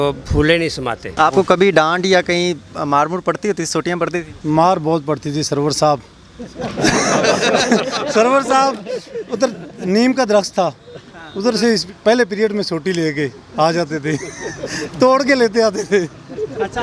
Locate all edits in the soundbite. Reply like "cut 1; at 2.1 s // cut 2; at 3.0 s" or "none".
cut 1; at 1.0 s